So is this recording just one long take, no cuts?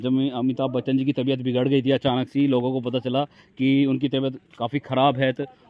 yes; 0 cuts

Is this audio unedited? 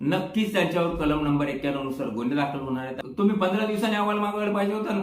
no; 1 cut; at 3.0 s

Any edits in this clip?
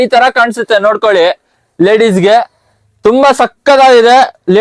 no; 0 cuts

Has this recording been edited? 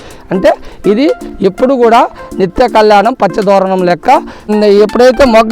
yes; 1 cut; at 4.5 s

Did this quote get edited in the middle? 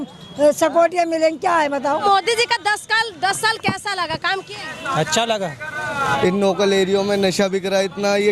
yes; 2 cuts; at 2.0 s, 6.0 s

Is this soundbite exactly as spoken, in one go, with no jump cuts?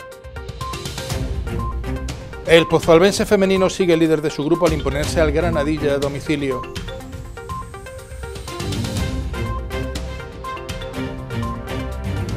yes; 0 cuts

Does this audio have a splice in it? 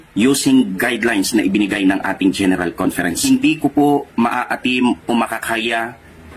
yes; 1 cut; at 3.2 s

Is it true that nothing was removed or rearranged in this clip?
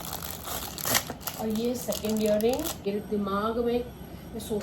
no; 1 cut; at 2.9 s

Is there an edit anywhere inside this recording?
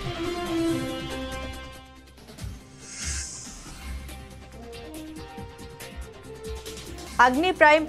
no; 0 cuts

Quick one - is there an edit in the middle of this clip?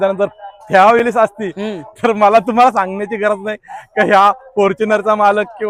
no; 0 cuts

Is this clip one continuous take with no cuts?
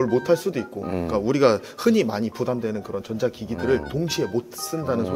yes; 0 cuts

